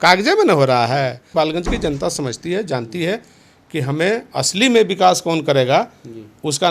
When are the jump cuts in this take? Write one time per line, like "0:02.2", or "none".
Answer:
0:01.3